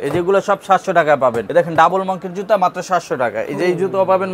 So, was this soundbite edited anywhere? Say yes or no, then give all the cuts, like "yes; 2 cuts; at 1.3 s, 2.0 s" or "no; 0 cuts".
yes; 1 cut; at 1.4 s